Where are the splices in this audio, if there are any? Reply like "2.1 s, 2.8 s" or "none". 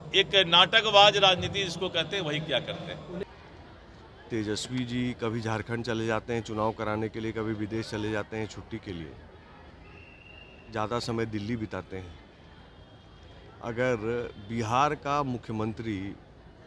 3.2 s